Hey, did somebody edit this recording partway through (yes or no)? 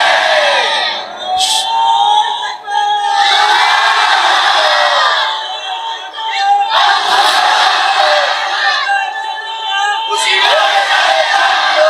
no